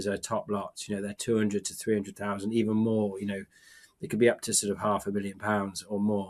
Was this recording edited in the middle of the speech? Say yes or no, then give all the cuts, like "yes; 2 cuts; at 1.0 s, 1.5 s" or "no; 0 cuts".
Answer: no; 0 cuts